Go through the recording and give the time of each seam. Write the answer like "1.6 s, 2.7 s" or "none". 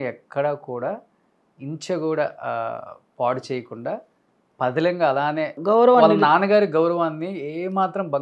none